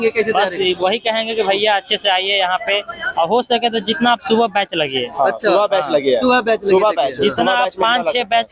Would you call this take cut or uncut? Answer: uncut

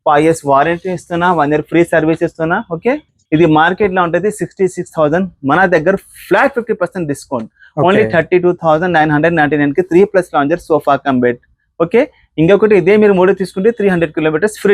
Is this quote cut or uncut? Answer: uncut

